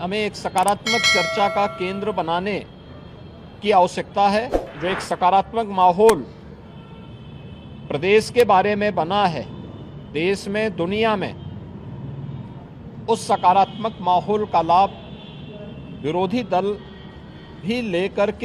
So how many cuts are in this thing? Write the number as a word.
one